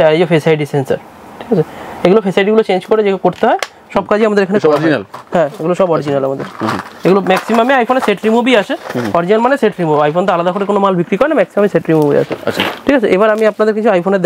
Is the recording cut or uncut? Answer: uncut